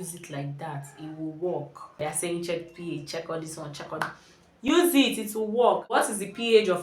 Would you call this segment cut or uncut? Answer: cut